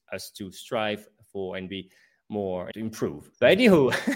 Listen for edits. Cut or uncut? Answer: cut